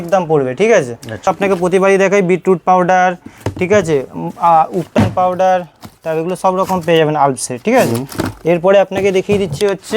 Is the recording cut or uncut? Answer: cut